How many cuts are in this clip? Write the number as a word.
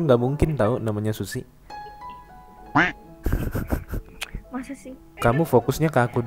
one